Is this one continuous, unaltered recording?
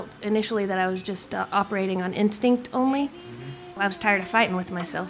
no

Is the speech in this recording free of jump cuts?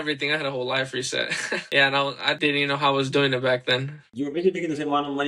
no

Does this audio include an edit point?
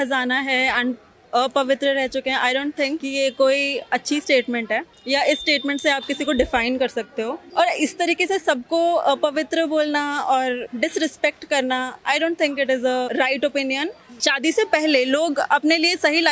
yes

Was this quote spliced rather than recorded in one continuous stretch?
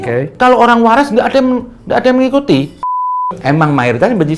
yes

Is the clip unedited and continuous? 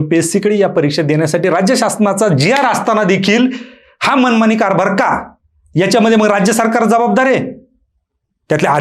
yes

